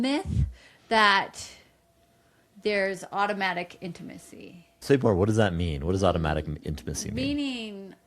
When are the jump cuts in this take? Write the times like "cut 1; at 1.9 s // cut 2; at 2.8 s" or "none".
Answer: cut 1; at 4.8 s

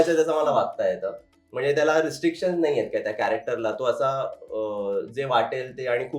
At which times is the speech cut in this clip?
none

